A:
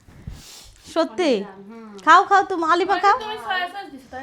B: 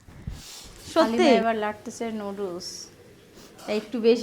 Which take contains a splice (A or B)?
B